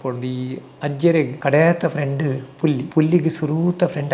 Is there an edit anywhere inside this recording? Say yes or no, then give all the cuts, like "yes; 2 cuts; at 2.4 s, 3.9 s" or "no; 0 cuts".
yes; 2 cuts; at 1.3 s, 2.9 s